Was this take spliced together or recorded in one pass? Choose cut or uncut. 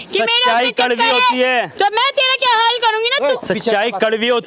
uncut